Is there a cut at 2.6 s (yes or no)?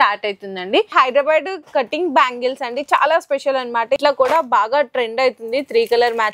no